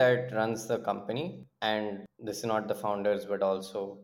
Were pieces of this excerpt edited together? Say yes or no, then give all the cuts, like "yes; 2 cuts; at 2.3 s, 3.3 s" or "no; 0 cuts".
yes; 2 cuts; at 1.5 s, 2.1 s